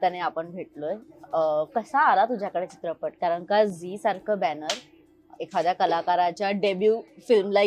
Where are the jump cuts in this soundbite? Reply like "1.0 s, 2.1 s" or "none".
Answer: none